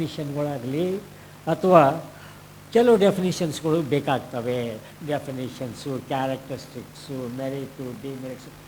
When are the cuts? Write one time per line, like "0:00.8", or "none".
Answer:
none